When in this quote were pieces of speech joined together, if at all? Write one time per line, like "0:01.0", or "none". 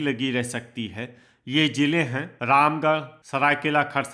0:02.3
0:03.2

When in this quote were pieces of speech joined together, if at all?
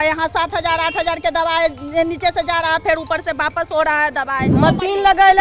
0:04.5

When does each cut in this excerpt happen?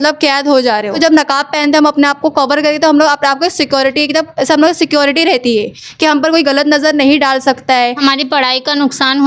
0:01.0
0:08.0

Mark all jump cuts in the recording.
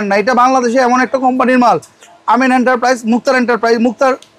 none

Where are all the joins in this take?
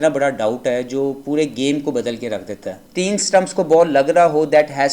0:02.8

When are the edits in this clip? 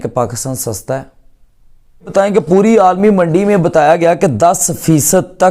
0:02.1

